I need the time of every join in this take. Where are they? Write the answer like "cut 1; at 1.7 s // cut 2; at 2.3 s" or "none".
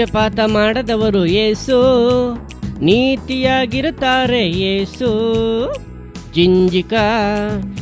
none